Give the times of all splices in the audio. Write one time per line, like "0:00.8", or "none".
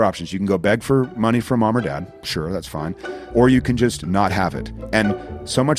none